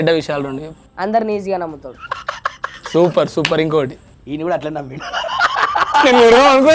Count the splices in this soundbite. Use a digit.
1